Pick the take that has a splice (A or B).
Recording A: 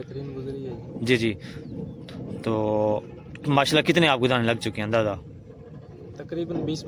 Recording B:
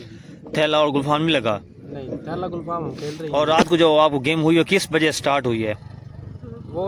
B